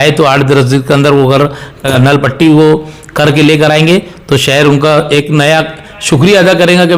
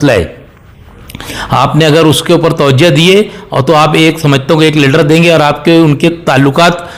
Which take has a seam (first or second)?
first